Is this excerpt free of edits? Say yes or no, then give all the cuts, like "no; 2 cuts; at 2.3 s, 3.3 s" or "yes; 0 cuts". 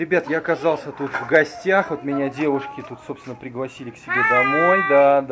yes; 0 cuts